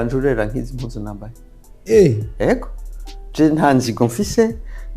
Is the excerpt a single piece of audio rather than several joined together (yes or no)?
yes